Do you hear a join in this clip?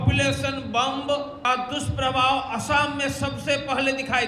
yes; 1 cut; at 1.4 s

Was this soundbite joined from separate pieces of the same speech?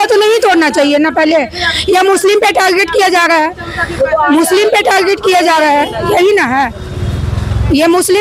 no; 0 cuts

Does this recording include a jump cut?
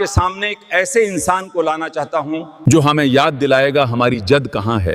yes; 1 cut; at 2.5 s

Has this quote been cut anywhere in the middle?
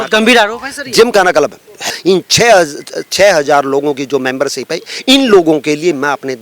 yes; 1 cut; at 1.9 s

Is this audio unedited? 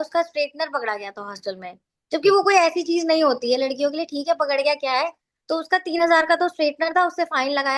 yes; 0 cuts

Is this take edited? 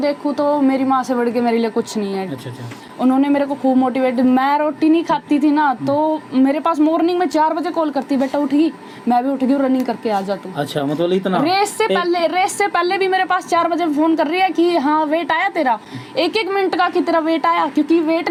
no; 0 cuts

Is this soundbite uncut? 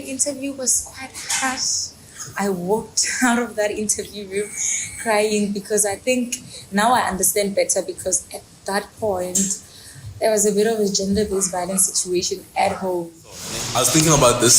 no; 1 cut; at 13.6 s

